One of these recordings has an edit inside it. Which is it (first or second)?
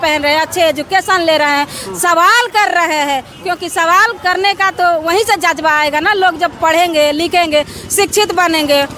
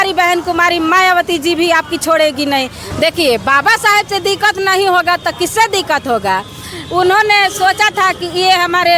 second